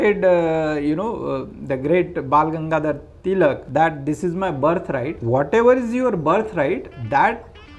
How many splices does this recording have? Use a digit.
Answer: 2